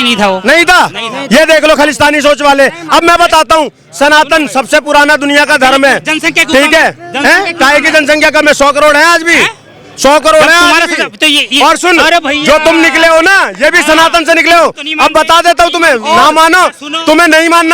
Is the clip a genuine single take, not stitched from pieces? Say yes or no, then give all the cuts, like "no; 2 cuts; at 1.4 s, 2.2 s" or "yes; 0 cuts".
yes; 0 cuts